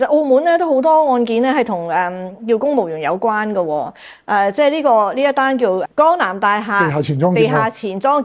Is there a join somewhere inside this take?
no; 0 cuts

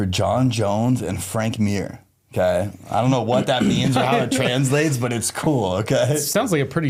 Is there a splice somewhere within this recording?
no; 0 cuts

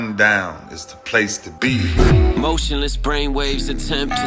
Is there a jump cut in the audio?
yes; 1 cut; at 1.6 s

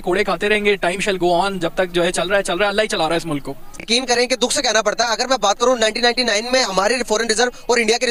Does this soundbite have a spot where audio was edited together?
no; 0 cuts

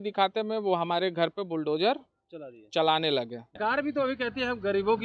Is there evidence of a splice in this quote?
yes; 1 cut; at 3.6 s

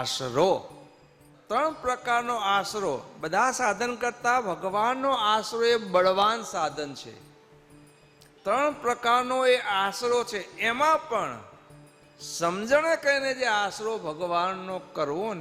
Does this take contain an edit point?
yes; 1 cut; at 1.3 s

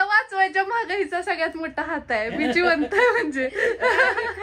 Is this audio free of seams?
yes; 0 cuts

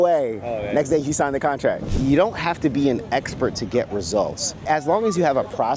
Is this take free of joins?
no; 2 cuts; at 1.9 s, 4.7 s

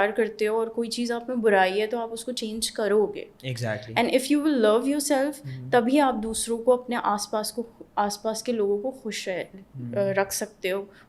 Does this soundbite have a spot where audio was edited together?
no; 0 cuts

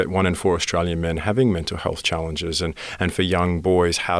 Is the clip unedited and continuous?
yes; 0 cuts

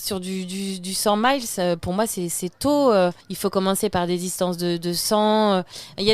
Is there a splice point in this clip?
yes; 1 cut; at 3.3 s

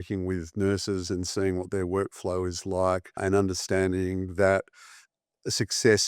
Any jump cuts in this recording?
yes; 1 cut; at 3.2 s

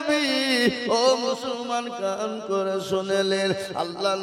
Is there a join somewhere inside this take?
no; 0 cuts

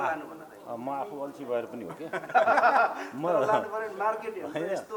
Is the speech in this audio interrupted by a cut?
no; 0 cuts

